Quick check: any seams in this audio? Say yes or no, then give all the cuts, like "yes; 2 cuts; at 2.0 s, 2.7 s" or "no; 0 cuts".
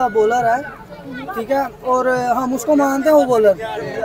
no; 0 cuts